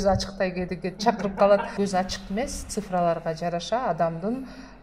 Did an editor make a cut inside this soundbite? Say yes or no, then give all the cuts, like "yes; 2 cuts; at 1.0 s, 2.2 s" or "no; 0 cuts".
yes; 1 cut; at 1.7 s